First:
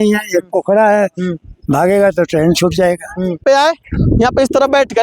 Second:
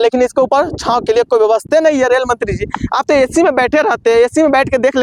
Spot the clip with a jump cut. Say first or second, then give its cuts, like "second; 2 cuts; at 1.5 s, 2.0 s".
first; 1 cut; at 3.4 s